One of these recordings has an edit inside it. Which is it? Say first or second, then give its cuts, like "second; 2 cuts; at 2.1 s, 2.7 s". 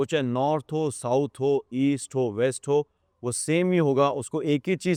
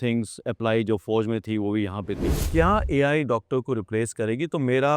second; 1 cut; at 2.5 s